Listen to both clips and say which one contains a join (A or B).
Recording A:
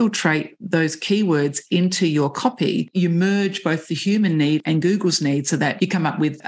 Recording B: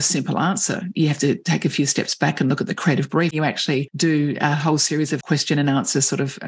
B